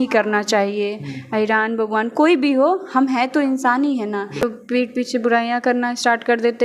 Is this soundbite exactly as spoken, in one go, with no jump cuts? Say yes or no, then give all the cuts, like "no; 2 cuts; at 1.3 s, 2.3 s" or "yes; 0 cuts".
no; 1 cut; at 4.4 s